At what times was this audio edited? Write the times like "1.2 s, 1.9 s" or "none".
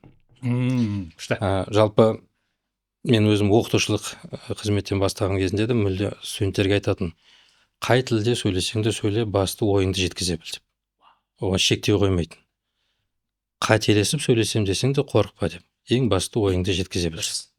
none